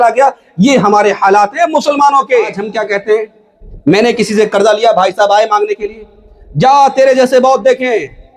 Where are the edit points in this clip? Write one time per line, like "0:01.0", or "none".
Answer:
0:02.7